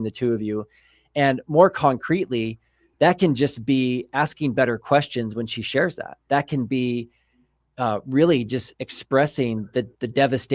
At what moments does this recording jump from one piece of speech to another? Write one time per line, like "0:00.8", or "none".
none

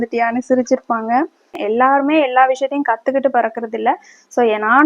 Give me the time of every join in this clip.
0:01.5

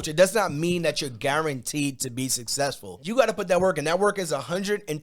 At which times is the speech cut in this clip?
0:02.9

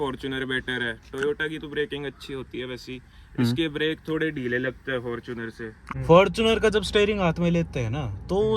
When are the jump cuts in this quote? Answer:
0:05.8

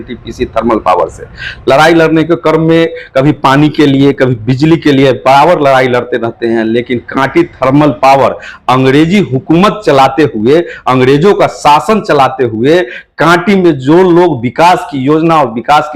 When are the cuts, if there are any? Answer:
none

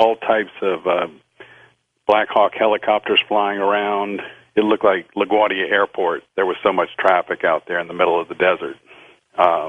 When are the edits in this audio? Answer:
0:06.2

